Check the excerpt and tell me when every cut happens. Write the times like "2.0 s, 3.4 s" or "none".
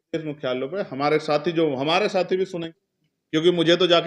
2.7 s